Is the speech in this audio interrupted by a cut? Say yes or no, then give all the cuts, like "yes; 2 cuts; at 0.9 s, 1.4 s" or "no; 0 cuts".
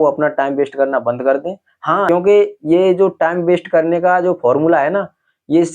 yes; 1 cut; at 2.1 s